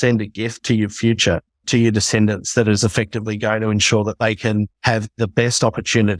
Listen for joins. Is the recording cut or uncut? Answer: cut